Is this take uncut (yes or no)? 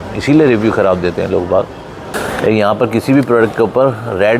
no